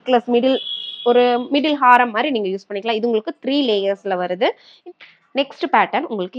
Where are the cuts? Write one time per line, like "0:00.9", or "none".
0:04.7